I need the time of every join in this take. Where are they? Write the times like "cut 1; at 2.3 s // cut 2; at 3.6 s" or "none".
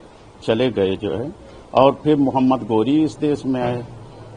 none